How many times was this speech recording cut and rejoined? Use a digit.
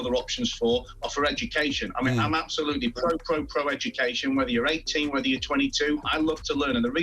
1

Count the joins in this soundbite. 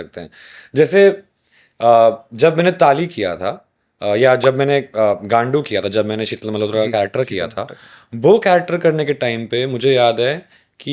0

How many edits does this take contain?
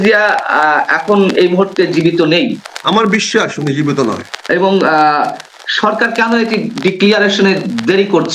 2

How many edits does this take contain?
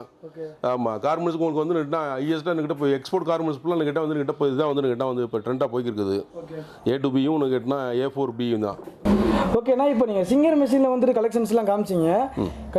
0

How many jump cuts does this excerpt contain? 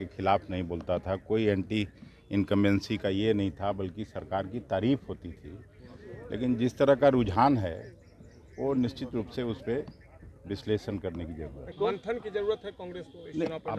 1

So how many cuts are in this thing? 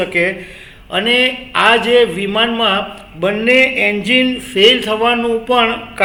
0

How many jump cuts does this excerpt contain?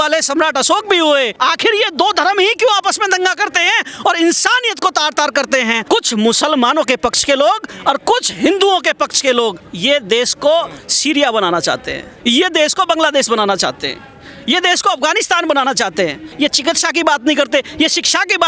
3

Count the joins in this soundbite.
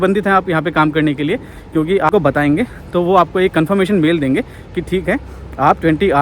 1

